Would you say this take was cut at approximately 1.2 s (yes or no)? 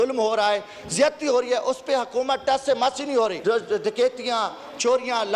no